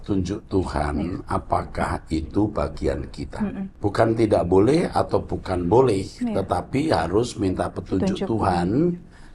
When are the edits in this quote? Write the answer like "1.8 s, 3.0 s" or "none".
3.7 s